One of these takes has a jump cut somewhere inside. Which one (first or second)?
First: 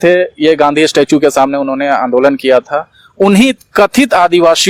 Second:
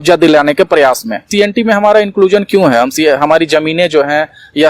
second